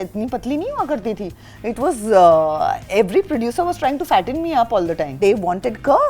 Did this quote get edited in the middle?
yes; 1 cut; at 5.2 s

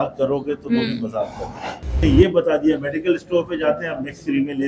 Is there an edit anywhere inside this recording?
yes; 1 cut; at 2.0 s

